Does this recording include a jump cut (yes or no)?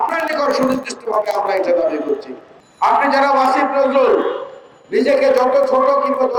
no